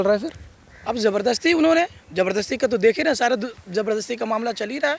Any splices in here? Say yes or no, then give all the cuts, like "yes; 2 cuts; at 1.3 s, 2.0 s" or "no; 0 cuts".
no; 0 cuts